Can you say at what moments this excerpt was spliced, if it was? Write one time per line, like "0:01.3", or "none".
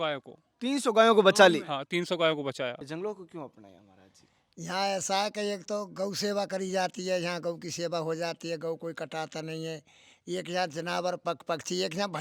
0:02.8